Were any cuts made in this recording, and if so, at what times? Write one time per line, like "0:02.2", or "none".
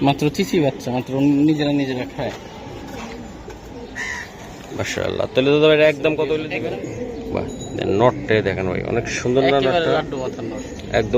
0:06.4